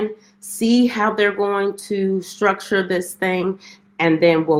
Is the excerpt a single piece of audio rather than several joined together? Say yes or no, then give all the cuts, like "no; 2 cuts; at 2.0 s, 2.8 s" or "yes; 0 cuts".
yes; 0 cuts